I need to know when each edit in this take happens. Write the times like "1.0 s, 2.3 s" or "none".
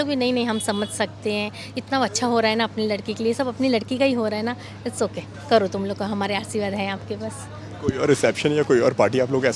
none